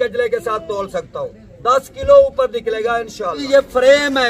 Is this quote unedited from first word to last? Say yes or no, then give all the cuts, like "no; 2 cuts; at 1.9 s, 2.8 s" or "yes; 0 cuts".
no; 1 cut; at 3.4 s